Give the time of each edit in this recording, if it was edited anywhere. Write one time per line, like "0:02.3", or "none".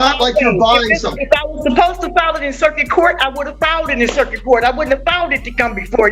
none